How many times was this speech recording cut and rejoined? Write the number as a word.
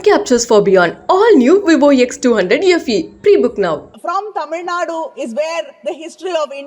one